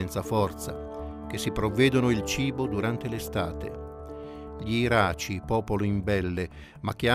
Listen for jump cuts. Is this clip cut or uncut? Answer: uncut